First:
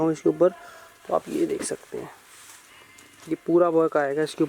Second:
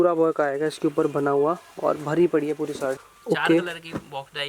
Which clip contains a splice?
second; 1 cut; at 3.0 s

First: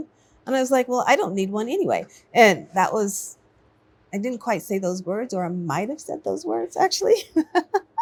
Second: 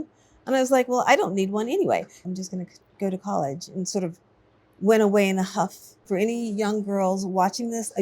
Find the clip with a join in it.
second; 2 cuts; at 2.2 s, 5.9 s

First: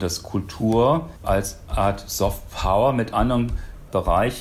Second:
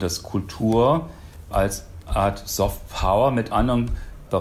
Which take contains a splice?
first; 1 cut; at 1.4 s

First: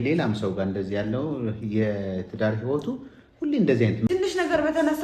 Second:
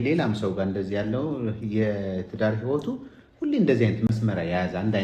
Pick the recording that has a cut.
first; 1 cut; at 4.1 s

